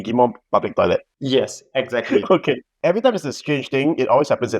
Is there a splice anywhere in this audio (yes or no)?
yes